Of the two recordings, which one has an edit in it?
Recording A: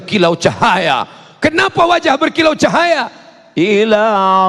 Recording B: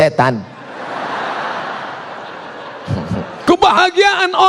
B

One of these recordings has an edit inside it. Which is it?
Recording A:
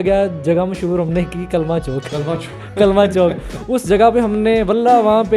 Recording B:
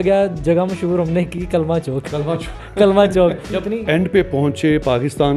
B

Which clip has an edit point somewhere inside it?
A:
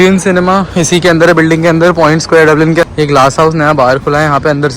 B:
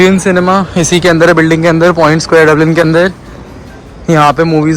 A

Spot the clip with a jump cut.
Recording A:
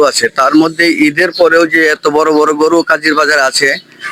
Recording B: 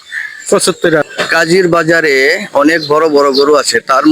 B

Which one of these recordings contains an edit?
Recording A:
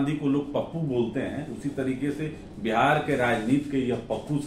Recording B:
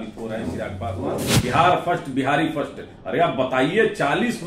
B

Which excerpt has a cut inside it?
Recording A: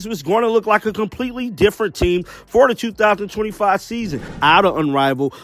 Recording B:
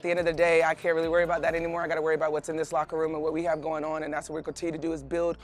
A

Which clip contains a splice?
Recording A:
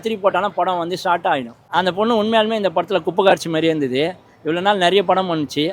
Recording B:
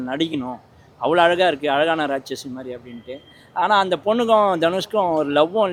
A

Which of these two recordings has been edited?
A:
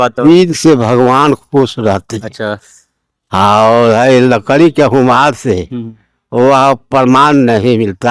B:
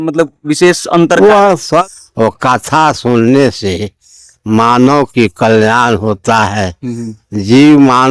B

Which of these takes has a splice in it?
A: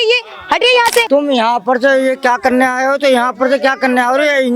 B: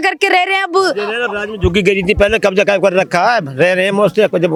A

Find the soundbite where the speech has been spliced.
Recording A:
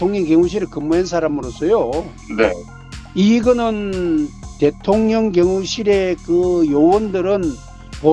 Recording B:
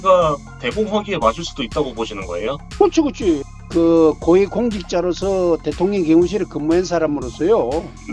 B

